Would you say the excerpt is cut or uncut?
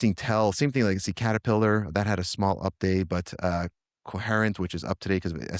uncut